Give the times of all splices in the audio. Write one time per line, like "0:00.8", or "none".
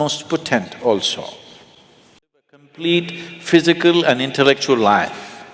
0:02.7